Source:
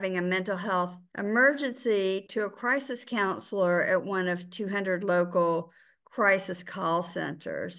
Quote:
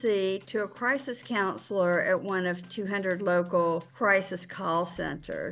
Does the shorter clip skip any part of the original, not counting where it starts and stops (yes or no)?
yes